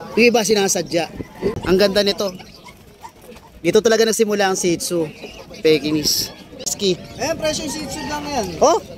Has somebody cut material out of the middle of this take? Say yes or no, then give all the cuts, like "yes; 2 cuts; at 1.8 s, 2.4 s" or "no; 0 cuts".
yes; 2 cuts; at 1.6 s, 6.7 s